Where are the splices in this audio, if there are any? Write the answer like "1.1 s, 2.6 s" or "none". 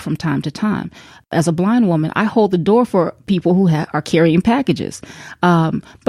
1.3 s, 3.2 s